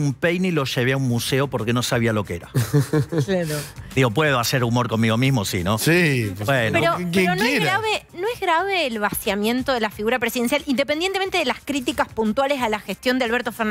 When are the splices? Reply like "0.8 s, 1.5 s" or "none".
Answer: none

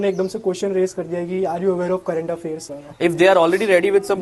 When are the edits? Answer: 2.7 s

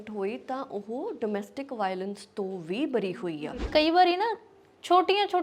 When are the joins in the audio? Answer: 3.7 s

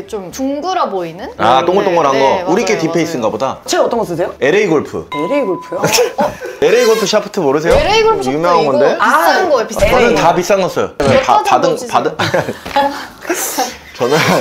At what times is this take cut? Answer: none

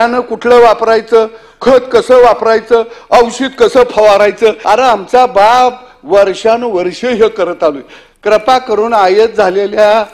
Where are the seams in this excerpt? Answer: 4.6 s

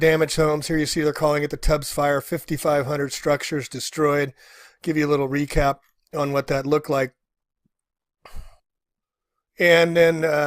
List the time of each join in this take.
5.9 s

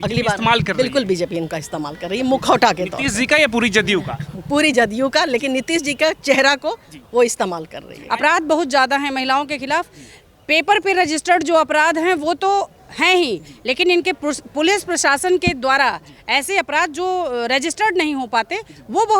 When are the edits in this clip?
7.9 s

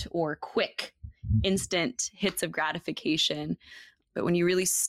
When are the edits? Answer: 4.0 s

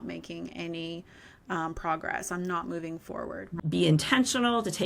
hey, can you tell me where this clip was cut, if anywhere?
3.5 s

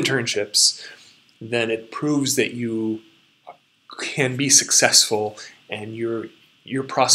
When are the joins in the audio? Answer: none

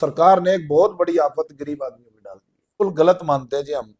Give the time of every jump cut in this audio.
2.8 s

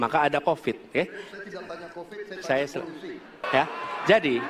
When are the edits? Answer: 3.4 s

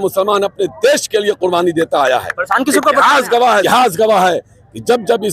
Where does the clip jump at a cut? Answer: none

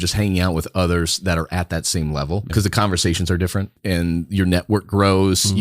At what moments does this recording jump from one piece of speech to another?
2.5 s, 3.8 s

